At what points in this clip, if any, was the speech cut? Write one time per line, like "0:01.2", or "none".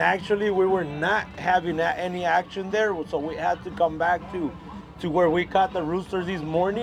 none